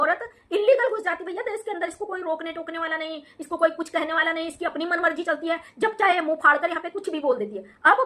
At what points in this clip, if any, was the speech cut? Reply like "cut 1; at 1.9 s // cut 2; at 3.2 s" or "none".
none